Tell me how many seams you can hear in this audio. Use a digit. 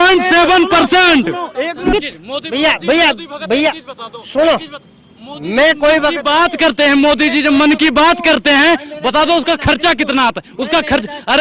1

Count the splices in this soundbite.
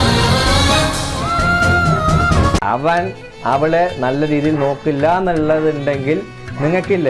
1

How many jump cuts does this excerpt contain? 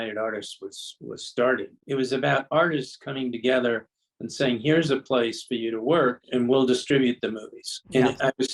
1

